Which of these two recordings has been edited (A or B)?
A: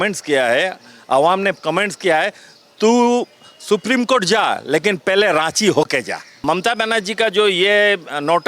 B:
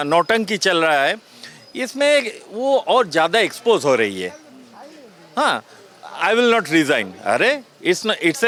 A